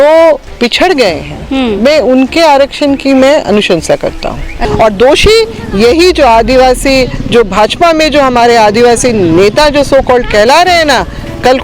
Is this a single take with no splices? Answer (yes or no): no